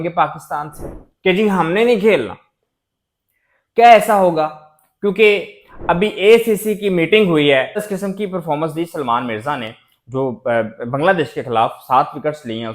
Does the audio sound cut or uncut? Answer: cut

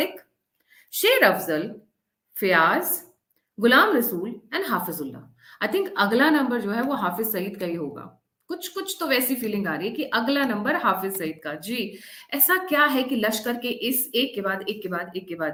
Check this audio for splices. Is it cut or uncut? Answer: uncut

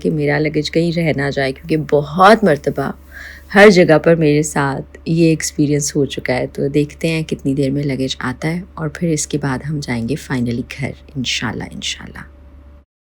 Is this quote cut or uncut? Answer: uncut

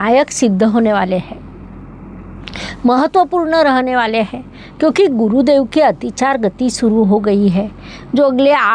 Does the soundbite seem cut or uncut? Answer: uncut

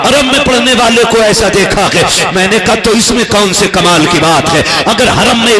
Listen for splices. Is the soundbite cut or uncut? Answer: uncut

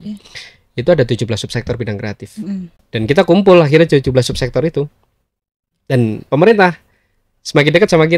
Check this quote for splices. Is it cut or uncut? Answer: cut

